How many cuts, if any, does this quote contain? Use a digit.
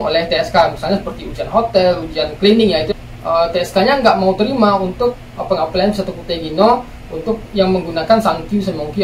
1